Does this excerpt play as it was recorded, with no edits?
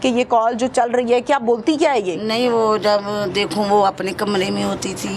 yes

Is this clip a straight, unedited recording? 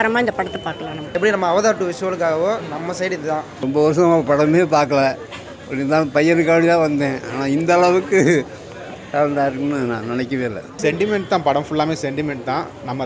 no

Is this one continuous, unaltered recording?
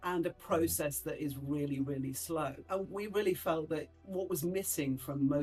yes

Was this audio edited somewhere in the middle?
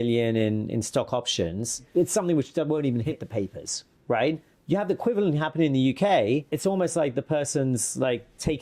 yes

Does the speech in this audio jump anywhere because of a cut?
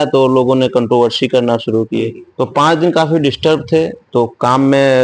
yes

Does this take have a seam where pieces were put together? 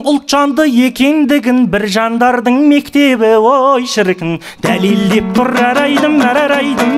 no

